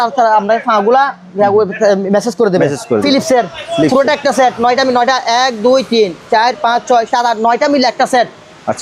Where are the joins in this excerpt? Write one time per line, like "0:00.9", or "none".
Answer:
0:03.0